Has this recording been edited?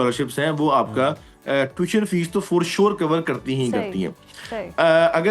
no; 0 cuts

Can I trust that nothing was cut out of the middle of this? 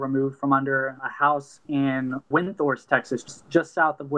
no; 3 cuts; at 1.0 s, 2.3 s, 3.2 s

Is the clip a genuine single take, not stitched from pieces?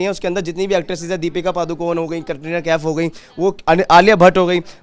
yes; 0 cuts

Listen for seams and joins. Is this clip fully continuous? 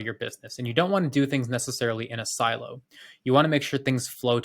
yes; 0 cuts

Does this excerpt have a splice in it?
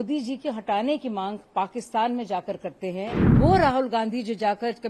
yes; 1 cut; at 3.2 s

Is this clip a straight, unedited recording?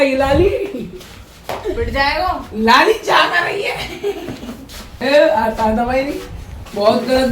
no; 1 cut; at 4.9 s

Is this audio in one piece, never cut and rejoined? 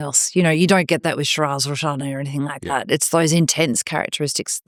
yes; 0 cuts

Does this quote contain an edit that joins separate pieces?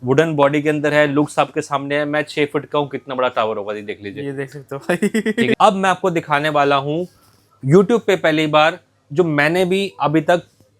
yes; 1 cut; at 5.5 s

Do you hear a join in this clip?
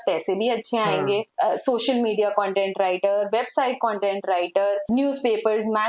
no; 0 cuts

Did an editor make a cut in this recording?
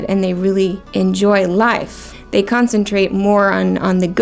yes; 2 cuts; at 0.8 s, 2.1 s

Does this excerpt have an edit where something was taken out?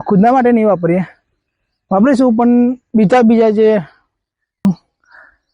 yes; 1 cut; at 4.7 s

